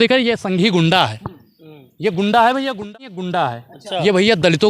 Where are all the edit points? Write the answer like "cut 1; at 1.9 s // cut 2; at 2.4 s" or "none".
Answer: cut 1; at 2.9 s

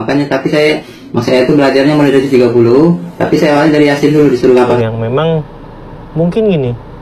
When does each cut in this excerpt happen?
cut 1; at 4.7 s

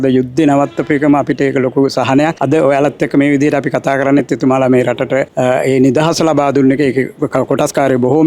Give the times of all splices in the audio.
none

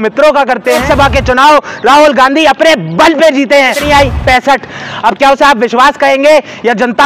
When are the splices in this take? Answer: cut 1; at 0.8 s // cut 2; at 3.8 s

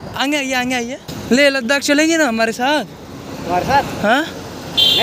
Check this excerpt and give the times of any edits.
cut 1; at 1.1 s

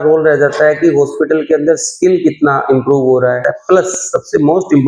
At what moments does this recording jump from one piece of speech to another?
cut 1; at 3.4 s

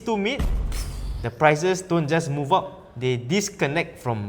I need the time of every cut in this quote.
none

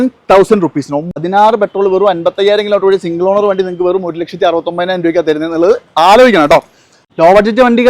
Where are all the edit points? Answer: cut 1; at 1.2 s // cut 2; at 7.0 s

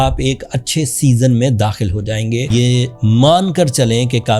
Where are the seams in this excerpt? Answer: cut 1; at 2.5 s

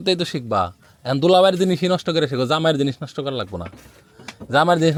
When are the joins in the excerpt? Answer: none

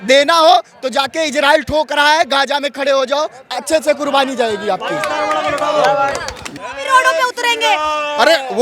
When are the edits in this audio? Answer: cut 1; at 6.5 s

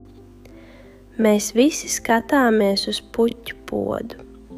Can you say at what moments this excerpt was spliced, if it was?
cut 1; at 1.2 s

